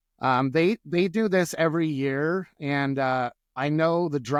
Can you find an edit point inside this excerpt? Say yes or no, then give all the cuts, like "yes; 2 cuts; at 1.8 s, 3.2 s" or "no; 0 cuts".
no; 0 cuts